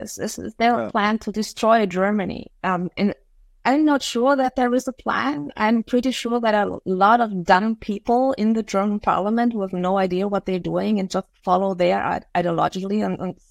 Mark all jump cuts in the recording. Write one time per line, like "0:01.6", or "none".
0:02.5